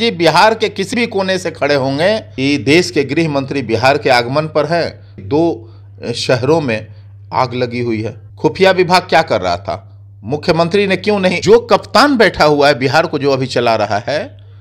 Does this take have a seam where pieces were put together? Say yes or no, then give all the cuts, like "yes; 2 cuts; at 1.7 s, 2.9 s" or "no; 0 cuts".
yes; 4 cuts; at 2.3 s, 5.2 s, 8.2 s, 11.4 s